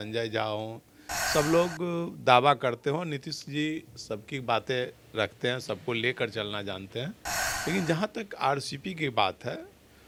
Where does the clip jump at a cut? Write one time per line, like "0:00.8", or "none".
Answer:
none